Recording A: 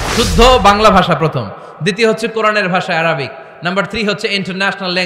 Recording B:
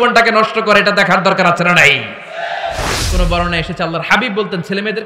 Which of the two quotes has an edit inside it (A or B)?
B